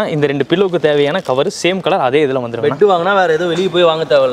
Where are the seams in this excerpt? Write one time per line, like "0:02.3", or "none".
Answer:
none

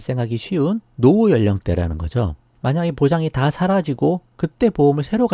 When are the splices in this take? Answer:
0:02.5

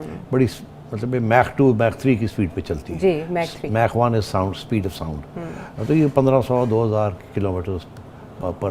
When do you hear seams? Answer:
none

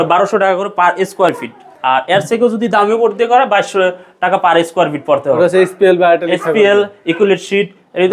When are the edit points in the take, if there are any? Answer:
none

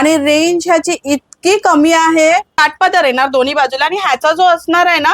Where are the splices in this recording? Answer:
0:02.6

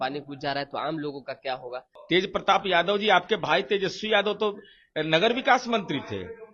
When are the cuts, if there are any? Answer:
0:01.9

